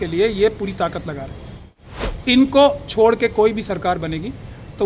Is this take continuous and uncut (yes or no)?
no